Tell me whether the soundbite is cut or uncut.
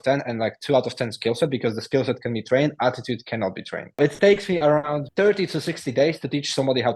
cut